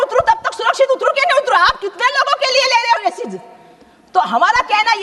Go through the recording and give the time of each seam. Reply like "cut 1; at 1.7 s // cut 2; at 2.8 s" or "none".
none